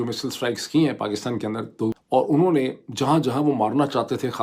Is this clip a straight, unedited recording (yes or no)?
no